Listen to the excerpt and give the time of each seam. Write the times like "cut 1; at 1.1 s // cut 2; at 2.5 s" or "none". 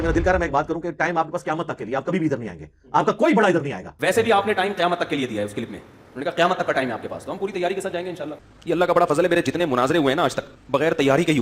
cut 1; at 3.8 s // cut 2; at 8.3 s // cut 3; at 10.5 s